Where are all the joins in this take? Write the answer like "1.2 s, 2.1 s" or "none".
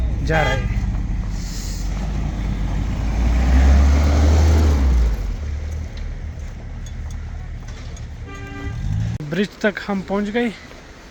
none